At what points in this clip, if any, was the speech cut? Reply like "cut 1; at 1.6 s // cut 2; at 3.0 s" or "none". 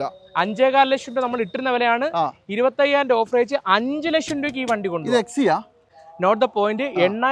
cut 1; at 6.0 s